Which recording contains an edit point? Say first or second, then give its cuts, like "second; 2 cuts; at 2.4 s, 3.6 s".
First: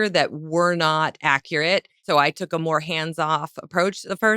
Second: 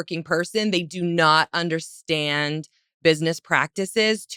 first; 1 cut; at 2.0 s